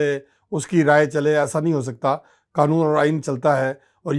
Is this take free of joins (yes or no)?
yes